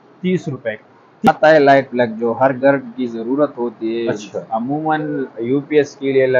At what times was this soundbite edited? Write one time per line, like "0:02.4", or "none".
0:01.3